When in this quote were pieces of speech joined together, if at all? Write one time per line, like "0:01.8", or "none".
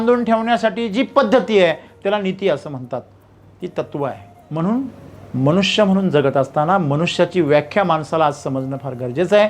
0:04.3